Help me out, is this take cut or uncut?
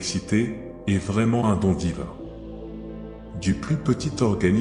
uncut